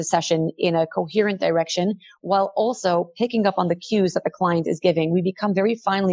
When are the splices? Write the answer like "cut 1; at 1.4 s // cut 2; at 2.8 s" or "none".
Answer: none

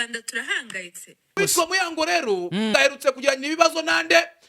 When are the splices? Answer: cut 1; at 1.4 s // cut 2; at 2.7 s

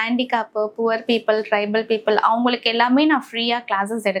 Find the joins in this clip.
none

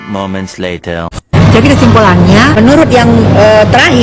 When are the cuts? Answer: cut 1; at 2.5 s

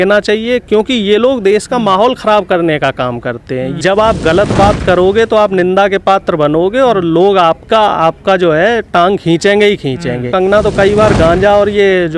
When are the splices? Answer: cut 1; at 3.7 s // cut 2; at 10.3 s

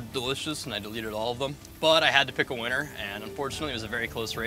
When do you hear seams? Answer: none

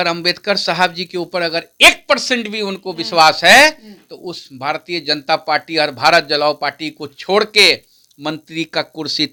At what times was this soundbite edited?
none

